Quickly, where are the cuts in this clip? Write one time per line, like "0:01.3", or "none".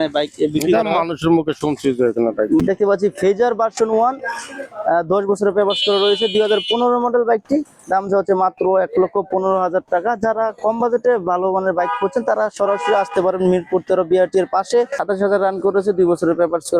0:02.6
0:15.0